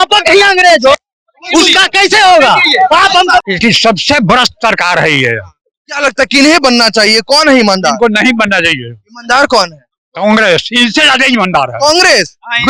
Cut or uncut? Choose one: cut